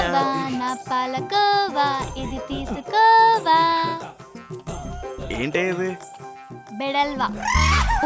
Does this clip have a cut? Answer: no; 0 cuts

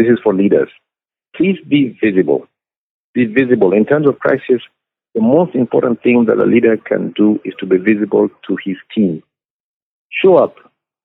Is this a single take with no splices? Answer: no; 1 cut; at 1.1 s

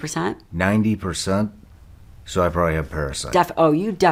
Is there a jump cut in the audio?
no; 0 cuts

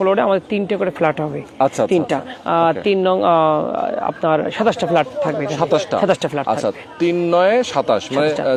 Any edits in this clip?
no; 0 cuts

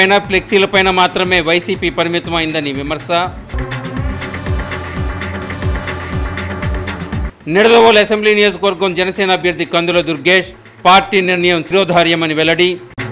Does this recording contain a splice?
no; 0 cuts

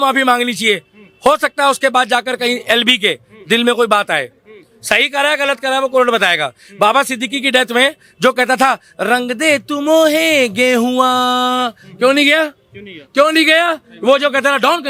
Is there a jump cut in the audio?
no; 0 cuts

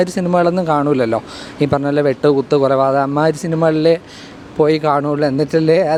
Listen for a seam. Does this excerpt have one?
no; 0 cuts

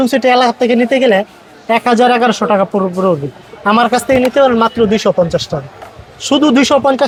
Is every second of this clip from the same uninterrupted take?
yes; 0 cuts

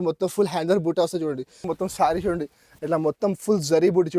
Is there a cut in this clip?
yes; 1 cut; at 1.7 s

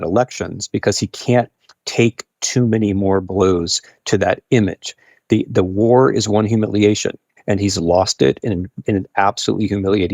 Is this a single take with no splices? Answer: no; 1 cut; at 7.3 s

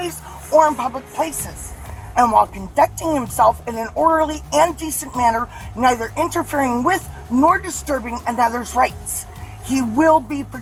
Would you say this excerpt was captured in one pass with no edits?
yes; 0 cuts

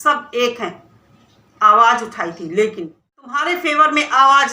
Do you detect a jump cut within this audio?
yes; 1 cut; at 3.3 s

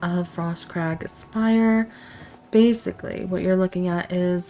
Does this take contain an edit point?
no; 0 cuts

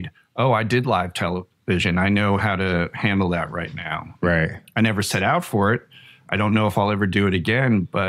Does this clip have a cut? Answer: no; 0 cuts

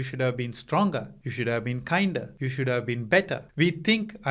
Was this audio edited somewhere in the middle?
yes; 3 cuts; at 1.2 s, 2.4 s, 3.4 s

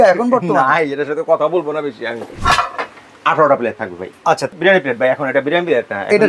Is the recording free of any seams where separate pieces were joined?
no; 2 cuts; at 2.3 s, 4.5 s

